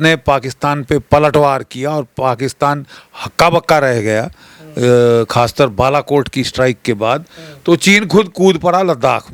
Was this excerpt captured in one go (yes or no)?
yes